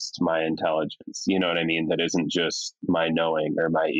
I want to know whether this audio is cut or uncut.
uncut